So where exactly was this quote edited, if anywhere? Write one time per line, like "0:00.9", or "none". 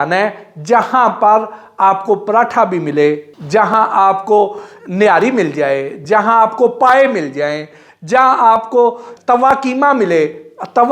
0:03.3
0:09.1